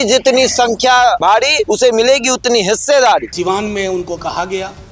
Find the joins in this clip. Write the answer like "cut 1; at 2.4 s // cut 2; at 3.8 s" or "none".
cut 1; at 1.4 s // cut 2; at 3.3 s